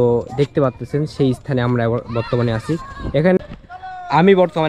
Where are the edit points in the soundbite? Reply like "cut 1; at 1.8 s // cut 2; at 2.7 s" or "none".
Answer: cut 1; at 3.4 s